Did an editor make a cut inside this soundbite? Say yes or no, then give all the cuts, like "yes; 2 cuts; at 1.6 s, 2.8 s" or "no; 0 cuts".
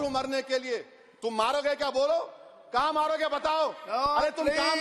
no; 0 cuts